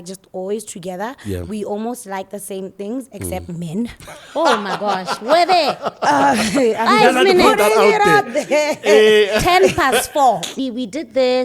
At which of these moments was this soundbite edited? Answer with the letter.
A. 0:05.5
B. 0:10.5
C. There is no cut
B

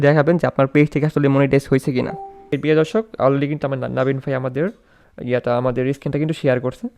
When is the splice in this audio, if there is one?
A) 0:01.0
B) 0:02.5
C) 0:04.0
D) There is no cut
B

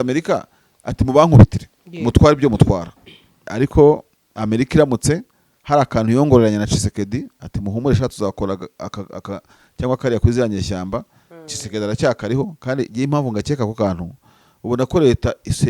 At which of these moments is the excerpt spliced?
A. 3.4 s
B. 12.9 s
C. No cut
A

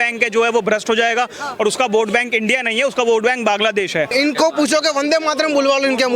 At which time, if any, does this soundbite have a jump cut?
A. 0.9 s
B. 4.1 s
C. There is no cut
B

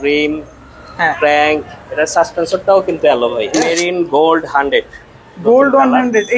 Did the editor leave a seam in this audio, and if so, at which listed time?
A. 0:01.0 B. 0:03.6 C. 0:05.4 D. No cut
B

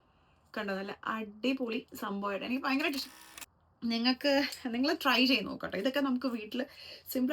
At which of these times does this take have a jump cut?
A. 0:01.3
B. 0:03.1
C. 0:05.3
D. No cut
B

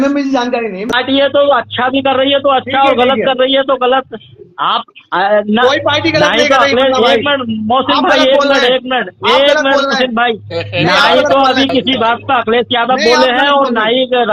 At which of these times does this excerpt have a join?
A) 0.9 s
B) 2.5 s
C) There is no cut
A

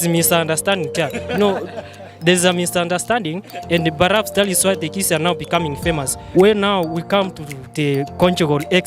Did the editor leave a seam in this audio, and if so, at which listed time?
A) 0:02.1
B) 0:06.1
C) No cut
B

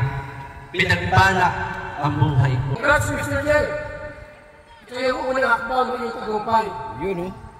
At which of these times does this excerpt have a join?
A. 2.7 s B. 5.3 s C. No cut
A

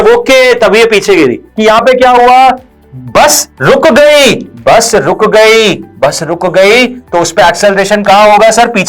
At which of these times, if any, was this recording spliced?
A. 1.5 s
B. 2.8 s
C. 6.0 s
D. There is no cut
A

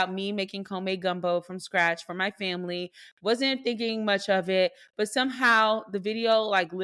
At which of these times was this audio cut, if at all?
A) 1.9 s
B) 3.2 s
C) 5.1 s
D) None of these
D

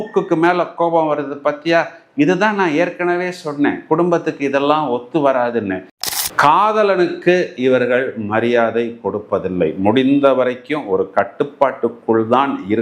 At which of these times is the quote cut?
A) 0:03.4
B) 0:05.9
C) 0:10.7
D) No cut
B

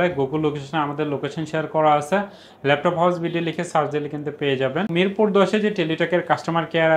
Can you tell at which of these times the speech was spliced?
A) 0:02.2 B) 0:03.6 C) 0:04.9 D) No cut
C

